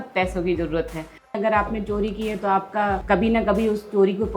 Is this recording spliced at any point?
yes; 2 cuts; at 1.3 s, 3.0 s

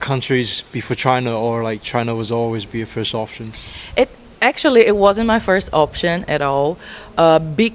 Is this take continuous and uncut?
yes; 0 cuts

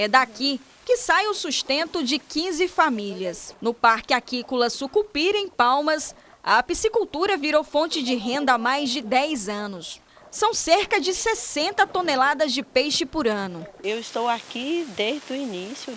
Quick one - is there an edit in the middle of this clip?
no; 0 cuts

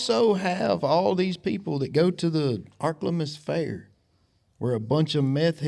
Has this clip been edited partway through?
no; 0 cuts

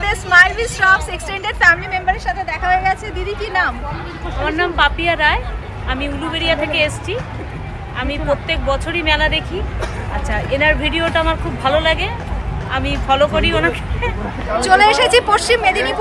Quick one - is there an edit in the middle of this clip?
no; 0 cuts

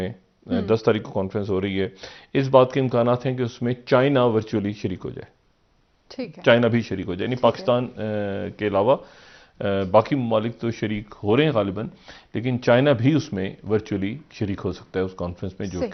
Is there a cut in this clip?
no; 0 cuts

